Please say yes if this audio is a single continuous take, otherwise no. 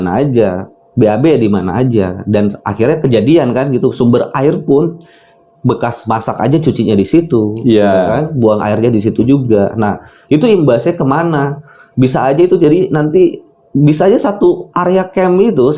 yes